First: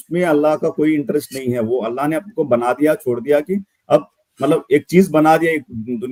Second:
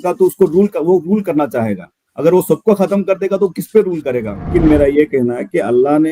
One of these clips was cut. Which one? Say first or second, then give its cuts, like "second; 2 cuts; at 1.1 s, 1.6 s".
second; 1 cut; at 4.5 s